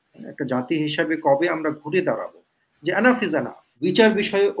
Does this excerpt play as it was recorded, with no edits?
no; 1 cut; at 3.6 s

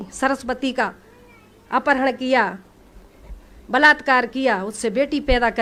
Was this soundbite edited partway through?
no; 0 cuts

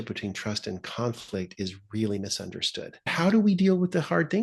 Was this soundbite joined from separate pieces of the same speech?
yes; 1 cut; at 3.1 s

